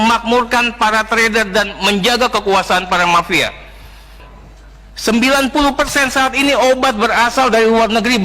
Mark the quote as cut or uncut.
cut